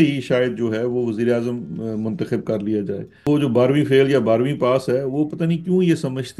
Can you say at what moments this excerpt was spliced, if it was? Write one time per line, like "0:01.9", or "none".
0:03.3